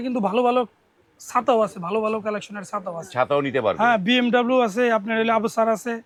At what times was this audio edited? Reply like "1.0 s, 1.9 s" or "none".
none